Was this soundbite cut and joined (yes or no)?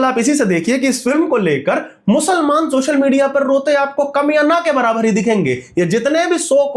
no